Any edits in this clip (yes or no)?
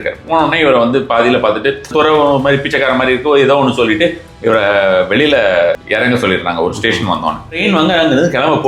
yes